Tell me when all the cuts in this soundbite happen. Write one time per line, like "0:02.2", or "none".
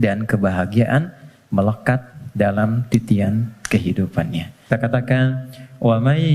0:04.7

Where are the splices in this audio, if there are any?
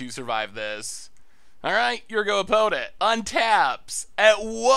0:02.9

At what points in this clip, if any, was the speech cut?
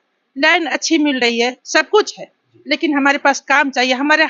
none

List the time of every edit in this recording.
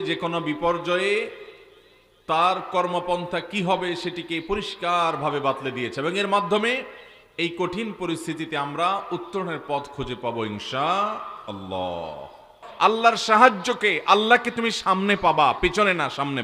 0:12.9

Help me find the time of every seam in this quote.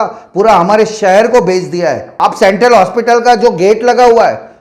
0:02.1

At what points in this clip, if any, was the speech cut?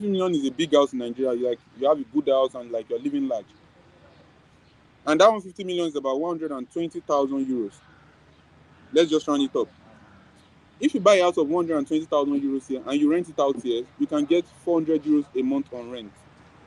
none

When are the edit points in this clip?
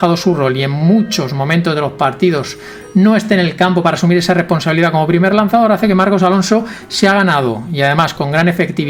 none

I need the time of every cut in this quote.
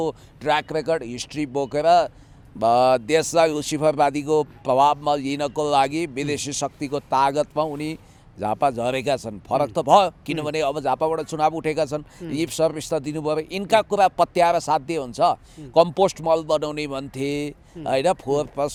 none

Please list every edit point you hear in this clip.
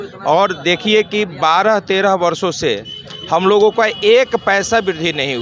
none

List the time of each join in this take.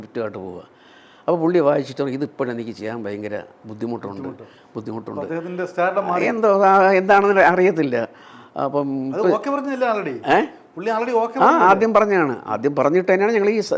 none

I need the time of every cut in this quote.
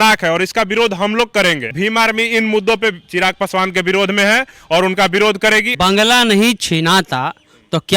0:01.7
0:05.7

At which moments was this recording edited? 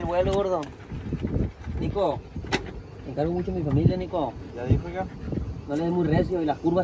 none

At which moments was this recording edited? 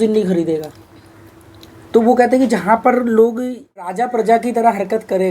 0:04.0

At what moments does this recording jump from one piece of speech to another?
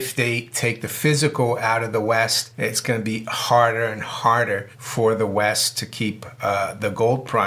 none

